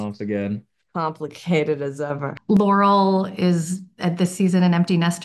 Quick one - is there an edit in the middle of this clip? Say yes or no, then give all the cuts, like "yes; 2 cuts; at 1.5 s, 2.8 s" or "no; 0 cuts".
yes; 1 cut; at 2.2 s